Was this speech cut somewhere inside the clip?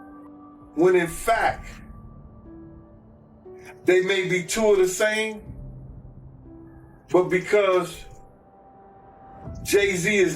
no; 0 cuts

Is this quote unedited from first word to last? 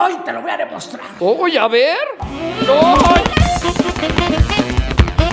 yes; 0 cuts

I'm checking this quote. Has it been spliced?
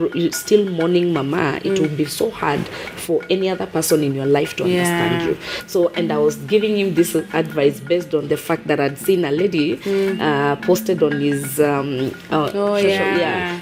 no; 0 cuts

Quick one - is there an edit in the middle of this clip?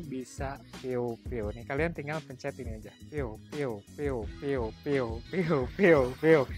no; 0 cuts

